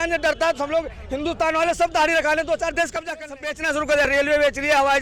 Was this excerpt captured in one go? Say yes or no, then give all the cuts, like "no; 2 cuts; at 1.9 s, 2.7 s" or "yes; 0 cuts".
no; 1 cut; at 3.4 s